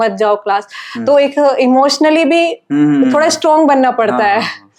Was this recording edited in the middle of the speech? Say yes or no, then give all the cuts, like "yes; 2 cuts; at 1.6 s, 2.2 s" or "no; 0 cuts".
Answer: no; 0 cuts